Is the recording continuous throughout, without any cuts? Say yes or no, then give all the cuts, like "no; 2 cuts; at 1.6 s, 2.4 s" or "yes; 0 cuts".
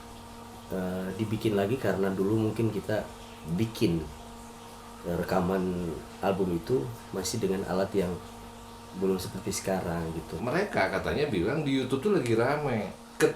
no; 1 cut; at 10.4 s